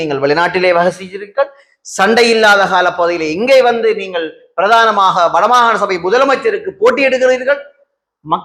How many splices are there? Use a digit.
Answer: 0